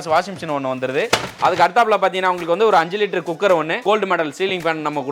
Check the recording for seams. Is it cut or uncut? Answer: cut